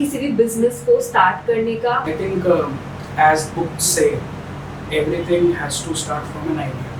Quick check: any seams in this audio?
no; 0 cuts

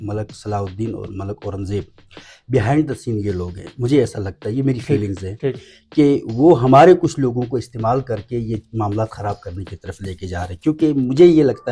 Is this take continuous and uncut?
yes; 0 cuts

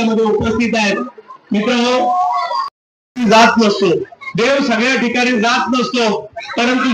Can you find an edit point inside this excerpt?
no; 0 cuts

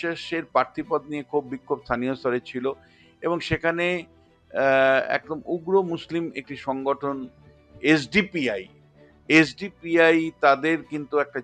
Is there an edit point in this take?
no; 0 cuts

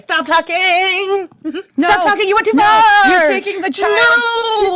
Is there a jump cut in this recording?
no; 0 cuts

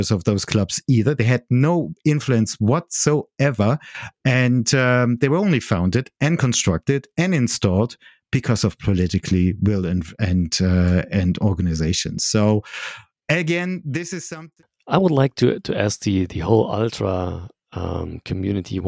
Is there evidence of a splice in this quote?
yes; 1 cut; at 14.2 s

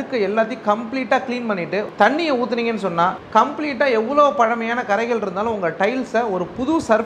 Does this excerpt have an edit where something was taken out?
yes; 2 cuts; at 1.9 s, 3.2 s

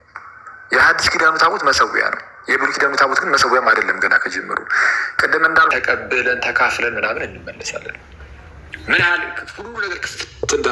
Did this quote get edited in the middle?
yes; 1 cut; at 5.7 s

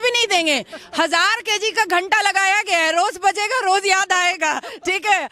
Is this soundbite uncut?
yes; 0 cuts

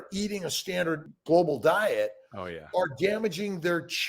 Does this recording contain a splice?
yes; 1 cut; at 1.1 s

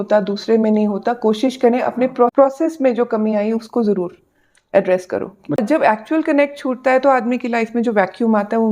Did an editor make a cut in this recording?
yes; 2 cuts; at 2.3 s, 5.6 s

